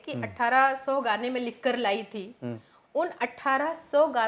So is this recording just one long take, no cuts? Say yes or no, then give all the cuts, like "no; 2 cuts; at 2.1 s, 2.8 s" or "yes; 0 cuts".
yes; 0 cuts